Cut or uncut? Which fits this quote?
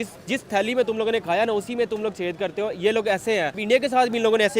cut